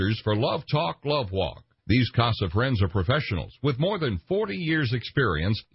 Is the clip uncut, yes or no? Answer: no